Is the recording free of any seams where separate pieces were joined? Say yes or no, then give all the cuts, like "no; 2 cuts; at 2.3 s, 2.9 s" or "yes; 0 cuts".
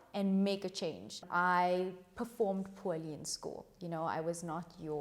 no; 1 cut; at 1.2 s